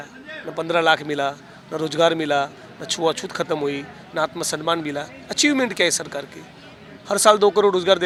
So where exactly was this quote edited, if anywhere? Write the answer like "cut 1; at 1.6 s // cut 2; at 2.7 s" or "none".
none